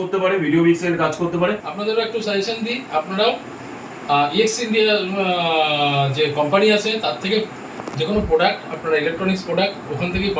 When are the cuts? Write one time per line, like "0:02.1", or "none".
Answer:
0:01.7